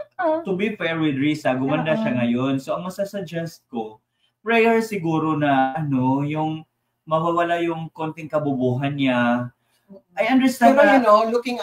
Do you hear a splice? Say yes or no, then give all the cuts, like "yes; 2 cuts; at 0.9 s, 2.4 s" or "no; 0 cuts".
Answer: no; 0 cuts